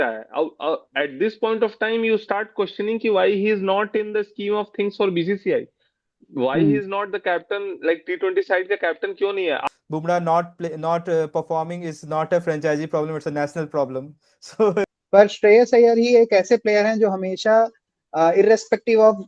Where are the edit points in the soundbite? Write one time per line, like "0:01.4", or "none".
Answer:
0:09.6
0:14.9